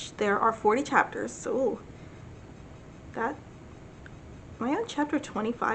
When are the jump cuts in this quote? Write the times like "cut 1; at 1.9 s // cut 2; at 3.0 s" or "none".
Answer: none